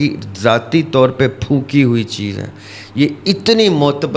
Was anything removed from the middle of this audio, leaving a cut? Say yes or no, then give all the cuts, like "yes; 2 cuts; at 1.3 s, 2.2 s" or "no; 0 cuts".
no; 0 cuts